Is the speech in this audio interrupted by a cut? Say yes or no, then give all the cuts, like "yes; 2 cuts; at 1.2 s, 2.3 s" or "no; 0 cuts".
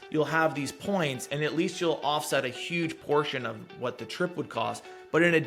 no; 0 cuts